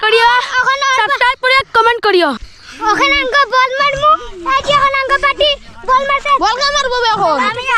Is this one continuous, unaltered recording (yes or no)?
yes